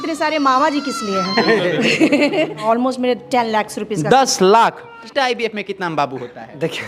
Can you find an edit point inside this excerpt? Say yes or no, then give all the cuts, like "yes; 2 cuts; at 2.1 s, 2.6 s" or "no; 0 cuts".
yes; 2 cuts; at 2.6 s, 5.1 s